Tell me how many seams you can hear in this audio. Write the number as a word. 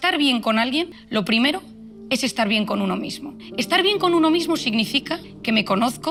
zero